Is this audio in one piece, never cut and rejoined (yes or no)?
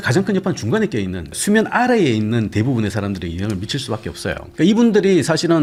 yes